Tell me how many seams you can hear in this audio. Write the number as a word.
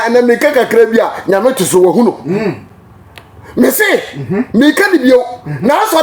zero